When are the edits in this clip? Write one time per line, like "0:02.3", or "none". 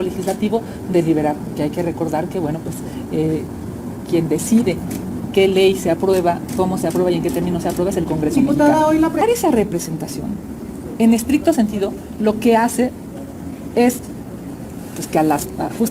0:09.2